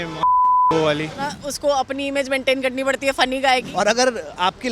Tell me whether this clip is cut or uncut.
cut